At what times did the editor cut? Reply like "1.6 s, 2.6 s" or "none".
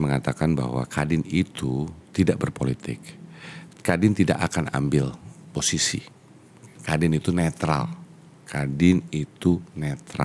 none